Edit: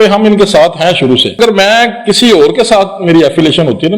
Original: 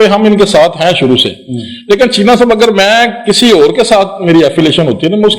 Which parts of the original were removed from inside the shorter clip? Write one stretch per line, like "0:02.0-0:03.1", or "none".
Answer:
0:01.4-0:02.6